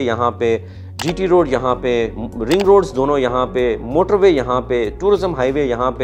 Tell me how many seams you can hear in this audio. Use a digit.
0